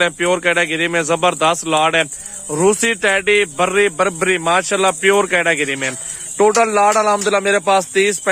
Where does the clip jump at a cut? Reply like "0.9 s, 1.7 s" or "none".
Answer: none